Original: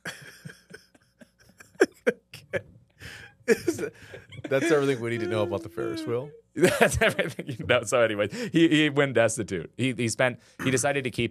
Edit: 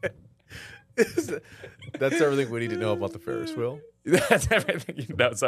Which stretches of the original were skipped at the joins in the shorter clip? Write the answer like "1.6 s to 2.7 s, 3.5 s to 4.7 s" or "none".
none